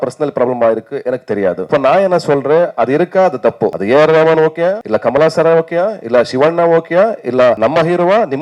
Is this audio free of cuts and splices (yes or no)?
no